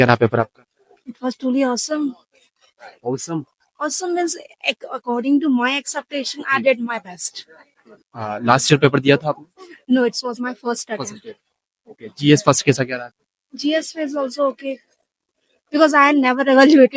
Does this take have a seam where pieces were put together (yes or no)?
no